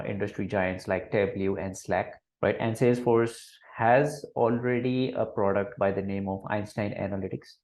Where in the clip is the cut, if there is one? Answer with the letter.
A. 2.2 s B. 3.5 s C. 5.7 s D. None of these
A